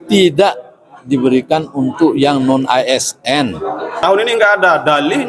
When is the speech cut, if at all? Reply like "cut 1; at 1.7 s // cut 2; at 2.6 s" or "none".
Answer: cut 1; at 4.0 s